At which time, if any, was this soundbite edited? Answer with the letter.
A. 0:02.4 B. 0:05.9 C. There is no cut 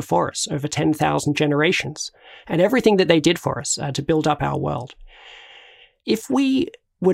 B